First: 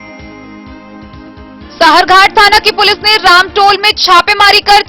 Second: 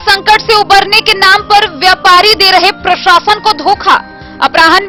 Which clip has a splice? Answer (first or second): first